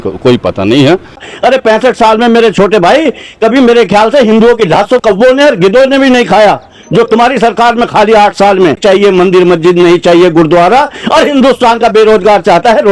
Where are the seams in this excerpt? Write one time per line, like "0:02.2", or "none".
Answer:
0:01.3
0:05.0
0:08.8

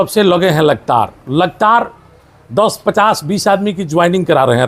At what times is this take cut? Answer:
none

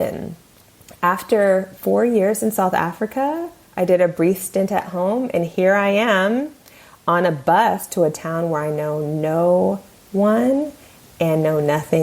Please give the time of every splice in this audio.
0:07.9

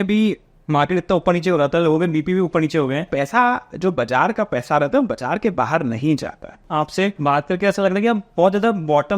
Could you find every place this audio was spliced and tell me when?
0:03.1
0:06.8

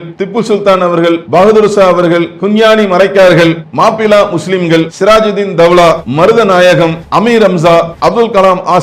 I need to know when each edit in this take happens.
0:01.2
0:02.3
0:03.6
0:04.9
0:06.1
0:07.0
0:07.9

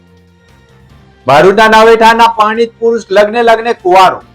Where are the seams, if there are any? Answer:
0:01.2

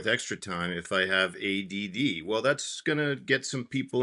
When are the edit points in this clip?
none

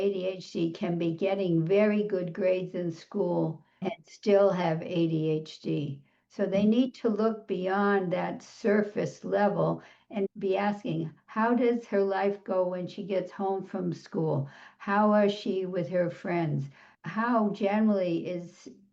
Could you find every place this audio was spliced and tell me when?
0:03.8
0:10.3

